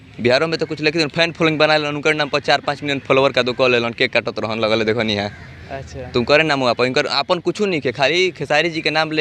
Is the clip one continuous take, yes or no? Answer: yes